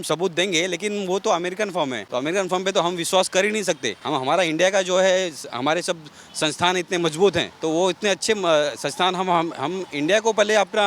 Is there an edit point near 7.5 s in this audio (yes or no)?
yes